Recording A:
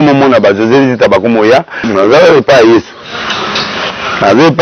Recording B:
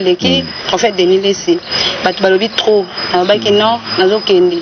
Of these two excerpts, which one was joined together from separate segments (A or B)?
A